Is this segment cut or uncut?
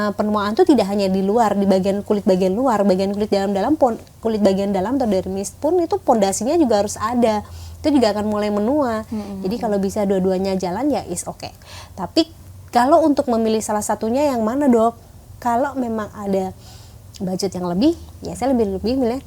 uncut